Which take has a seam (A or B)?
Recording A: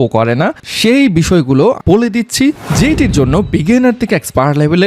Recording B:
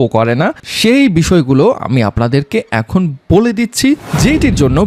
A